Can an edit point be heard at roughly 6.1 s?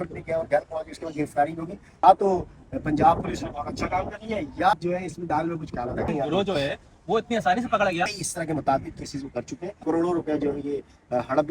yes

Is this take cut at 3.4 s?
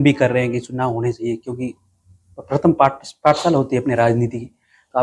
no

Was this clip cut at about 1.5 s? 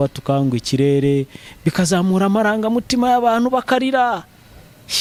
no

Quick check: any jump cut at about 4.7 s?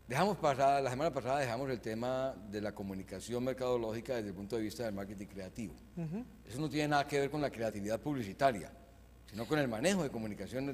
yes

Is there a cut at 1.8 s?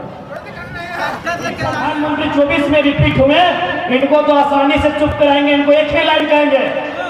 yes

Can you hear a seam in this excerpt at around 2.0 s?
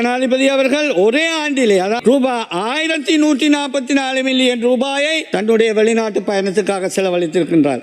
yes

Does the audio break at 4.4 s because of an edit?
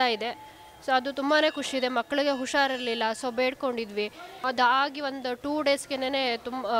yes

